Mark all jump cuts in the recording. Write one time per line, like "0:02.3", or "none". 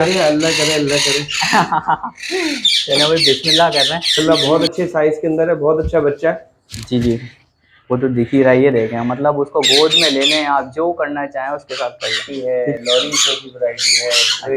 0:04.2
0:12.3